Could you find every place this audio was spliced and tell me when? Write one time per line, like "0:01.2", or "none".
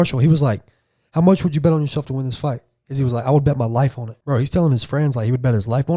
0:04.1